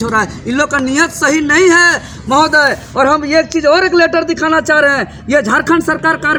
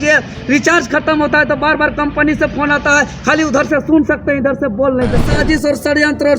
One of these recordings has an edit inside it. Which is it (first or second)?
second